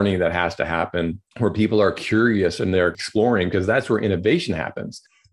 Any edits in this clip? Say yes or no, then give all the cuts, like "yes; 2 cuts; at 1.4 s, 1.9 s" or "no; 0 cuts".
yes; 1 cut; at 1.2 s